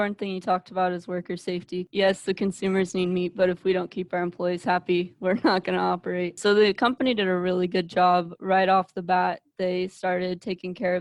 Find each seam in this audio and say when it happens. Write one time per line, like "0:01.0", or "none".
0:01.9
0:06.4